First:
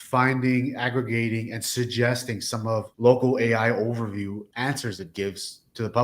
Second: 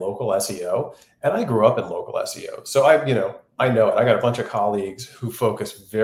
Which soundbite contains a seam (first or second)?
first